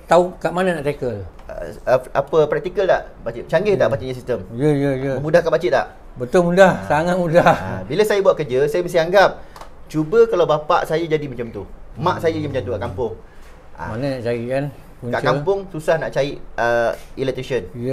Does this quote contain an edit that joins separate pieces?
yes; 1 cut; at 1.3 s

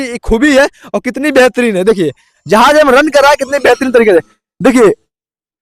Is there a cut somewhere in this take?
no; 0 cuts

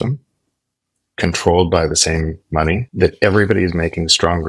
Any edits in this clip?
no; 0 cuts

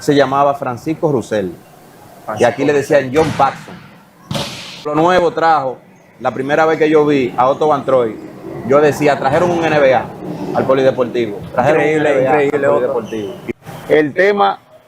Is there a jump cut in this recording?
yes; 2 cuts; at 4.9 s, 13.4 s

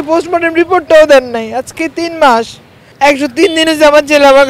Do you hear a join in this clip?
yes; 1 cut; at 2.8 s

